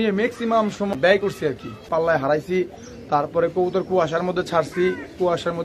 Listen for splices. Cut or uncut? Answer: cut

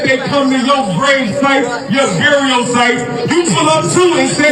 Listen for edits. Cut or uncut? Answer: uncut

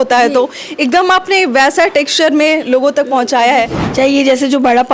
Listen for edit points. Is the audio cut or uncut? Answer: cut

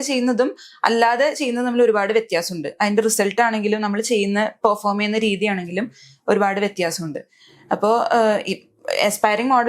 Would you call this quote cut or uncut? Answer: uncut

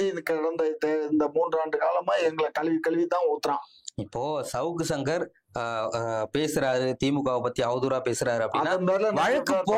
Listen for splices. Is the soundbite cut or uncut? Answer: uncut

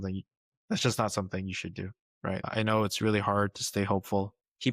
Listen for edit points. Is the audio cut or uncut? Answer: cut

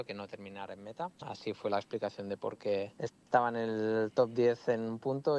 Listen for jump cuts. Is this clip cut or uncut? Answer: cut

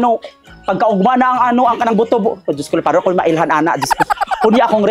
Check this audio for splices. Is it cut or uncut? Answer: uncut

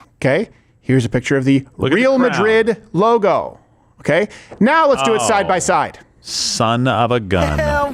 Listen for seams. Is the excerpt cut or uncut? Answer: uncut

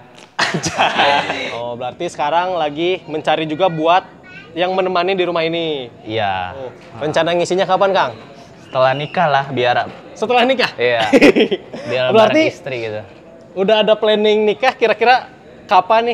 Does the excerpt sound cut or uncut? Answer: cut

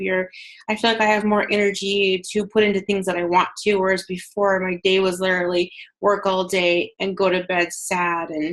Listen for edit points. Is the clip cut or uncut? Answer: uncut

